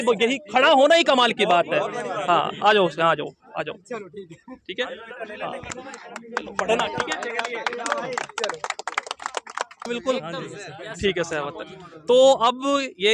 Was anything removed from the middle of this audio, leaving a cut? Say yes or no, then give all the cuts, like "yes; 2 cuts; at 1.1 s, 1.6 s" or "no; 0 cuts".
yes; 1 cut; at 9.9 s